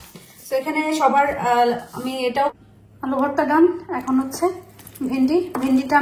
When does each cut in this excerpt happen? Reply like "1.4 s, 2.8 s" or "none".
2.5 s